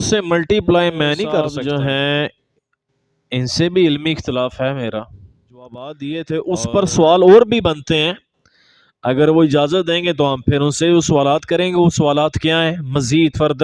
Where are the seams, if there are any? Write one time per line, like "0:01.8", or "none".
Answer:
0:01.5
0:05.8